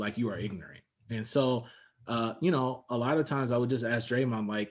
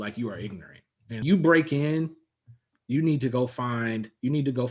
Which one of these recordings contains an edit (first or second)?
second